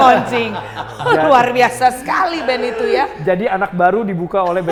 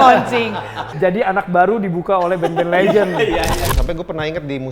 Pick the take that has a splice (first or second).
second